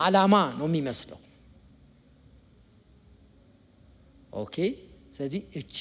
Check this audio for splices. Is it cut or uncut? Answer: uncut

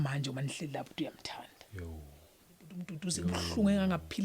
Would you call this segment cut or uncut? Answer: cut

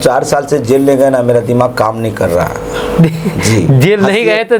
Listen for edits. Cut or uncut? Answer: uncut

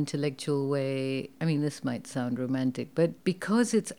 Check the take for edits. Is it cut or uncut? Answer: cut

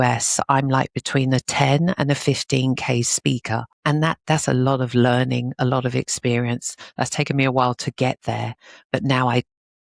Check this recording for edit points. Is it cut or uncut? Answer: cut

